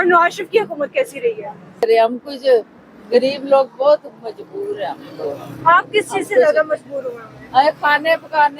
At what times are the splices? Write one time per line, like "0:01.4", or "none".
0:01.8